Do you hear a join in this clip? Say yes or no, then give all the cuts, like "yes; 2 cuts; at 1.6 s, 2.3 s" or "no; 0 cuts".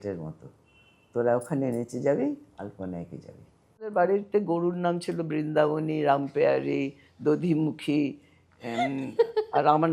yes; 1 cut; at 3.9 s